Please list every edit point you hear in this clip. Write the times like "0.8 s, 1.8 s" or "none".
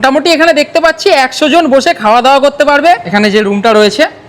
3.0 s